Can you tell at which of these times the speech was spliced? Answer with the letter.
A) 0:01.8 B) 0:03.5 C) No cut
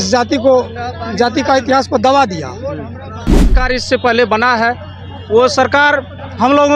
B